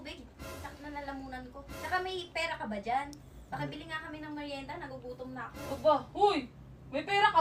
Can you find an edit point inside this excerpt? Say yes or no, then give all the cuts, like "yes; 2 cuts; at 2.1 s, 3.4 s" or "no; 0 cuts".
no; 0 cuts